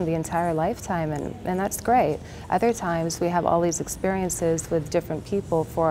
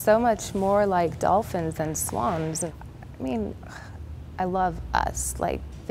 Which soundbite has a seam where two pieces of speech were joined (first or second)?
second